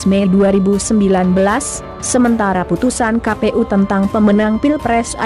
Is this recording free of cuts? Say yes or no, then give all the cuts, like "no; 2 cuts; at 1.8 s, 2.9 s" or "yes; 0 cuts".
yes; 0 cuts